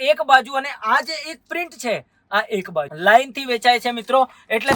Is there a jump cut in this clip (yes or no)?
no